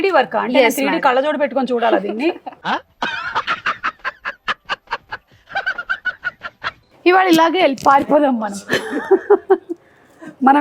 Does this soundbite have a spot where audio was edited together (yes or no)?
yes